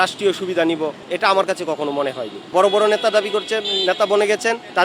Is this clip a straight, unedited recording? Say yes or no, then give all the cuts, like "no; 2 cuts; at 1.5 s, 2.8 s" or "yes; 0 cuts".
no; 1 cut; at 2.4 s